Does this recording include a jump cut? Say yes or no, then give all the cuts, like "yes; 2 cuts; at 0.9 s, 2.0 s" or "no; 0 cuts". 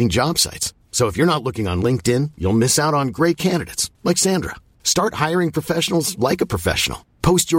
no; 0 cuts